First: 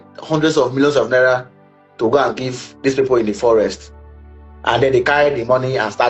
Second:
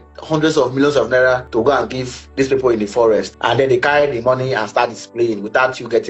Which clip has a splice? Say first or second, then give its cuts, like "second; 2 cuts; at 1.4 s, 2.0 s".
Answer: second; 2 cuts; at 1.5 s, 3.3 s